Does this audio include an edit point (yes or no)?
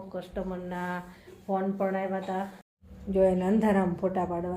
yes